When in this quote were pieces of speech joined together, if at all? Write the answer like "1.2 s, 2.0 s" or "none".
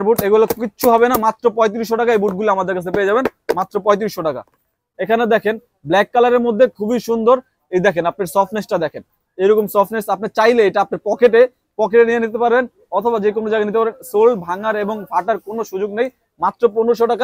4.8 s